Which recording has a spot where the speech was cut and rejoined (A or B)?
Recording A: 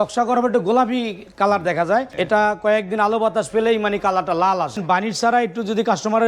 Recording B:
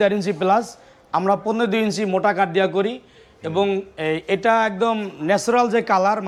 A